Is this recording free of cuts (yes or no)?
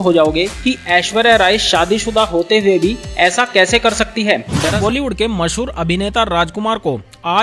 no